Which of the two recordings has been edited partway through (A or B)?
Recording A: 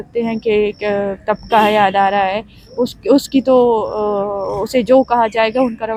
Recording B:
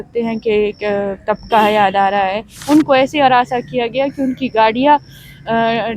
B